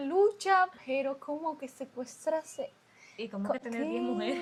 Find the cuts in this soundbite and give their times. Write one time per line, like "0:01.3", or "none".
none